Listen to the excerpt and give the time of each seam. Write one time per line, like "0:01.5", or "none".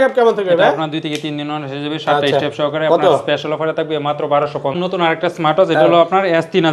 none

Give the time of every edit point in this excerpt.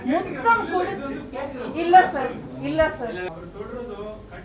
0:03.3

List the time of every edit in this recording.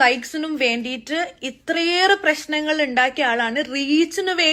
none

